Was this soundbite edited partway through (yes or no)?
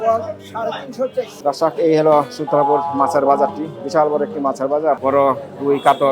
yes